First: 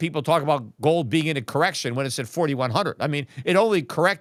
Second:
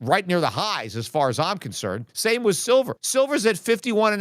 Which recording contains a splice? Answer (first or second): second